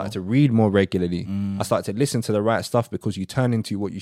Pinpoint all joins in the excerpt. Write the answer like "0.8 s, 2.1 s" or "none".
none